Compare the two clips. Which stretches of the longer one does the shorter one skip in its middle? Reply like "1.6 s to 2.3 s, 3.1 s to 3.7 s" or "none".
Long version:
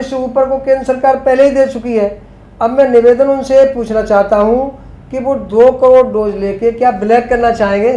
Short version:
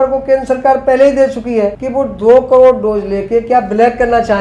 2.2 s to 5.1 s